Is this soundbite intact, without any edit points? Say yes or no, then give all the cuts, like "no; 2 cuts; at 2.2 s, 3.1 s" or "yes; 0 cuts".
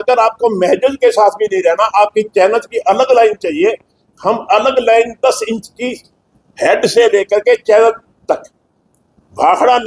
yes; 0 cuts